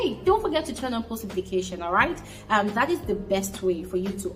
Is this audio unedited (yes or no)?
yes